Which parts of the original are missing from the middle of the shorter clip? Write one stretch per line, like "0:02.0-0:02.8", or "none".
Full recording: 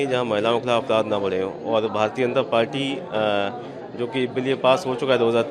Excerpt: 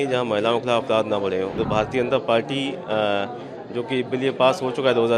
0:01.6-0:01.9